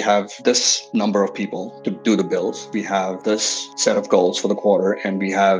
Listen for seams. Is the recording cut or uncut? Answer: uncut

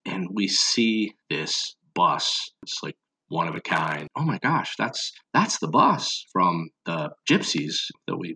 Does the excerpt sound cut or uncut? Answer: cut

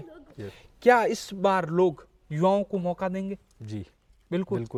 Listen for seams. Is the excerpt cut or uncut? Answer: uncut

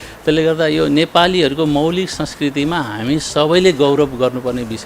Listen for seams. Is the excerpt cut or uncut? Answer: uncut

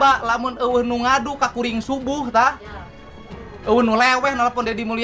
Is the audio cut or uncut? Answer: uncut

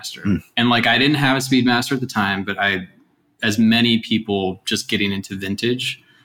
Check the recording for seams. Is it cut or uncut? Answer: uncut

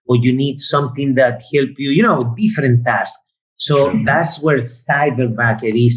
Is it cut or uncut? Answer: uncut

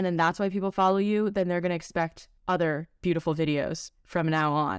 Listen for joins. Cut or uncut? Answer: cut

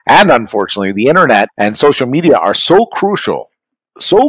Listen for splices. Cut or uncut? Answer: cut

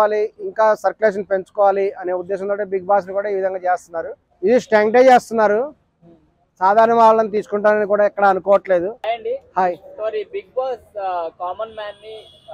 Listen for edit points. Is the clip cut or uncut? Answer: cut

